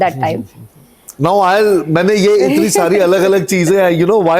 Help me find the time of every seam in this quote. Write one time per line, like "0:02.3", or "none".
0:01.0